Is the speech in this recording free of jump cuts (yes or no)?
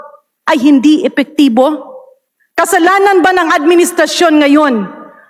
yes